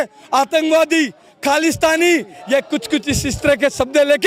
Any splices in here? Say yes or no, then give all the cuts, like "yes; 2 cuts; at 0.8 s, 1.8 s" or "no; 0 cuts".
no; 0 cuts